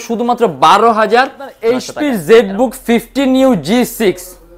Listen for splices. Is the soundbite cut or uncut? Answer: cut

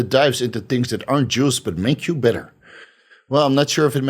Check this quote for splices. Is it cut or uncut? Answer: uncut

